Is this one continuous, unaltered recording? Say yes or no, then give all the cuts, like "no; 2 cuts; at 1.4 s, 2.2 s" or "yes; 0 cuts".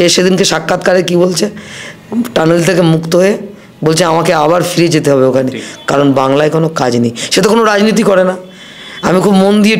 yes; 0 cuts